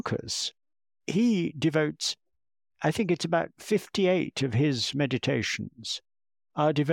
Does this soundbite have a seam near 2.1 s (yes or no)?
no